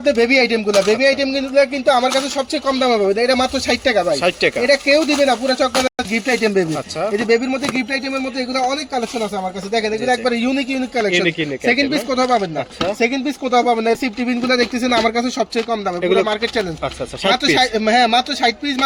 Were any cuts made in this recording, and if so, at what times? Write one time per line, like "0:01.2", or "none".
none